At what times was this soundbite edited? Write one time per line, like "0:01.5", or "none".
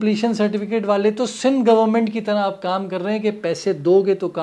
none

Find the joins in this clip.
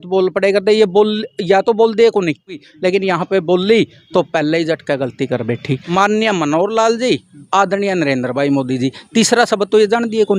0:02.7
0:05.8

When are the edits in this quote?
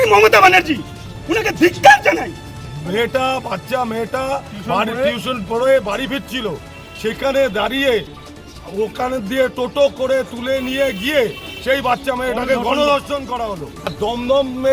0:02.6
0:13.8

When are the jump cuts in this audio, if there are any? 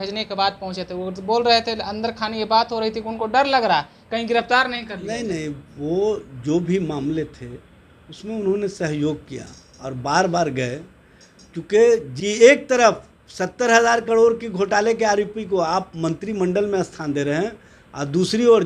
0:12.1

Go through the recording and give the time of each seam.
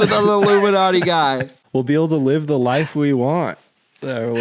0:01.5

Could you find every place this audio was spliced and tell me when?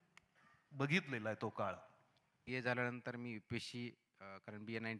0:02.3

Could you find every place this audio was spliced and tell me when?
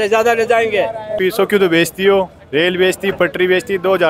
0:01.2

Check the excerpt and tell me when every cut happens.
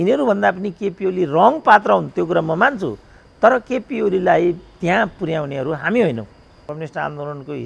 0:06.5

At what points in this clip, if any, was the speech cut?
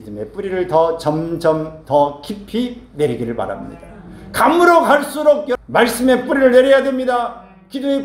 0:05.5

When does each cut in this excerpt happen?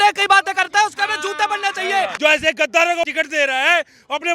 0:02.1
0:03.1

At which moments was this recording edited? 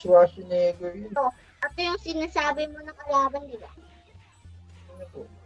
0:01.2

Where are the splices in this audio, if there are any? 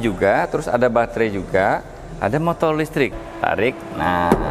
0:03.1

